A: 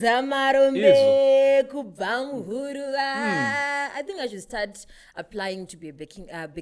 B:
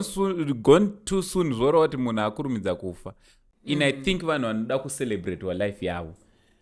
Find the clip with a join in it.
B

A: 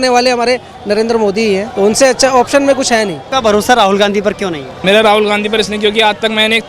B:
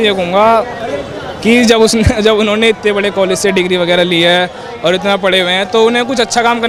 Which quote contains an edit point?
A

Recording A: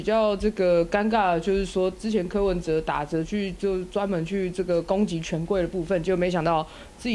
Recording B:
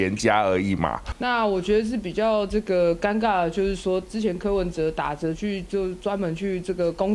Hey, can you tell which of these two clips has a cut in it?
B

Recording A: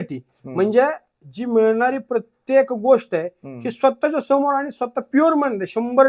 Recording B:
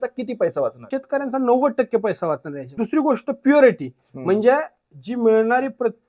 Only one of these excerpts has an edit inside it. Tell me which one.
B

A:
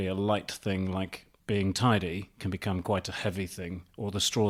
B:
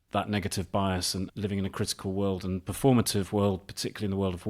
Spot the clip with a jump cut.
B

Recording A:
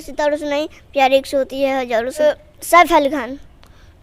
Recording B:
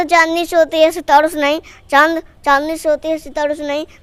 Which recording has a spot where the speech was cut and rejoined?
A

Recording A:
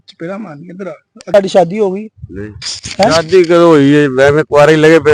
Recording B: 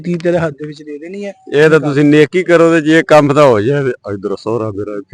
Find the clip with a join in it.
A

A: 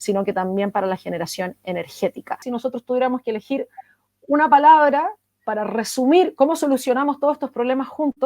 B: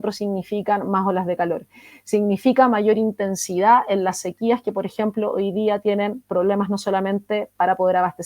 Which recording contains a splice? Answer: A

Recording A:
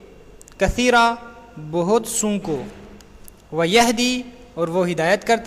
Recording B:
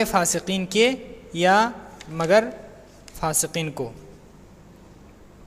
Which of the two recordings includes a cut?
B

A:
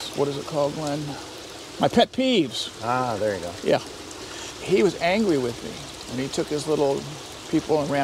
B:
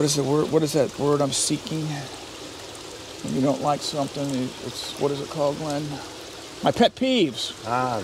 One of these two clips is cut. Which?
A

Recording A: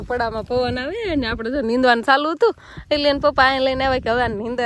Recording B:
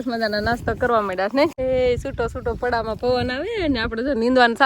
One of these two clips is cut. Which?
B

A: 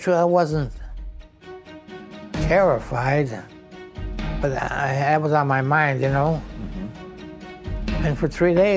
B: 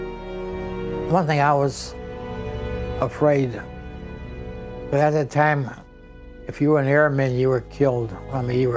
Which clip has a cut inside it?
B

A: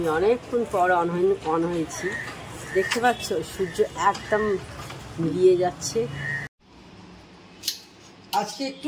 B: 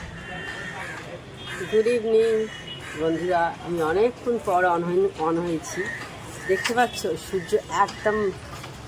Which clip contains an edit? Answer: A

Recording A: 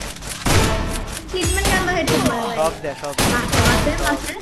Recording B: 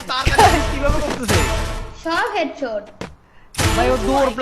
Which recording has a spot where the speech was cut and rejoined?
B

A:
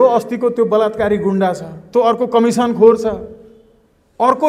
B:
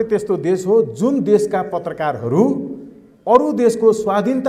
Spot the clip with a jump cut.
A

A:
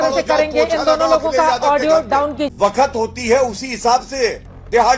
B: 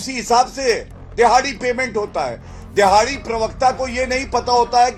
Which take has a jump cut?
A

